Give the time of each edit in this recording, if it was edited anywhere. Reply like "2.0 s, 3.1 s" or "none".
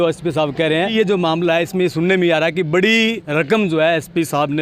0.9 s